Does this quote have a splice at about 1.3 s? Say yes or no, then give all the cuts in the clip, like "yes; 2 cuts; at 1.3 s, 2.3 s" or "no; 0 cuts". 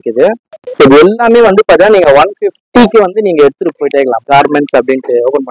no; 1 cut; at 4.2 s